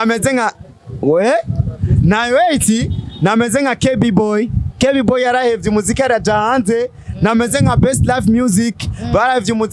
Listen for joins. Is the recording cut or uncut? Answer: uncut